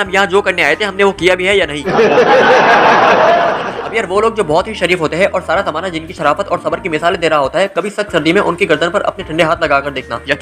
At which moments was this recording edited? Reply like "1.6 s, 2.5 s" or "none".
3.7 s